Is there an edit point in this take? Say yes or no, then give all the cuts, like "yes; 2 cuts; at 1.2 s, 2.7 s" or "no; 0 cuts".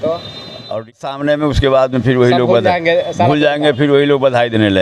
yes; 1 cut; at 1.0 s